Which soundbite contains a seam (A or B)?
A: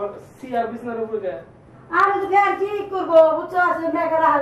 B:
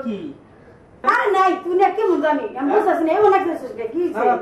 B